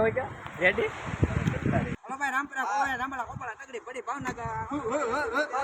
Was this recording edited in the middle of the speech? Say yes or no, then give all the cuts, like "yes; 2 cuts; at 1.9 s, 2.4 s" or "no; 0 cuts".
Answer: yes; 1 cut; at 2.0 s